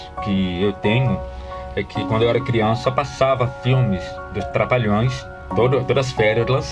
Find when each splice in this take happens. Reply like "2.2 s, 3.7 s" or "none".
5.4 s